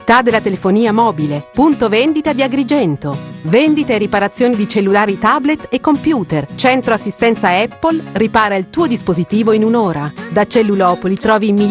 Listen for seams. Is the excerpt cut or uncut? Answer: cut